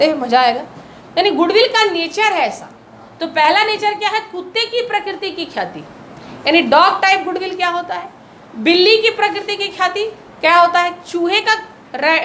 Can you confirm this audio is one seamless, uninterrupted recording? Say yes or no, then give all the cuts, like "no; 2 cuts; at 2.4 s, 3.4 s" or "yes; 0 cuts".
yes; 0 cuts